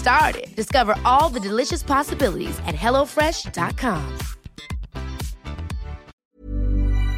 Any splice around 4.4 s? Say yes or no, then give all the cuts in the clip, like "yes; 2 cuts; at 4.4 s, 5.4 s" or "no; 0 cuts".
no; 1 cut; at 6.1 s